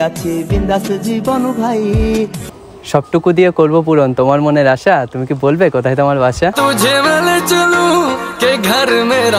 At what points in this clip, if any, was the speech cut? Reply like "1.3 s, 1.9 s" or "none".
2.4 s